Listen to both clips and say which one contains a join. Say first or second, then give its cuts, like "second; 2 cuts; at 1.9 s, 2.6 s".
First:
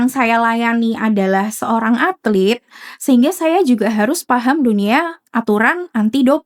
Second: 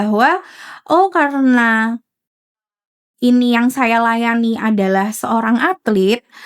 second; 1 cut; at 2.7 s